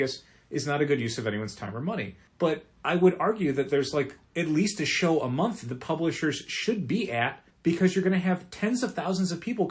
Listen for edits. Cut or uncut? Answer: cut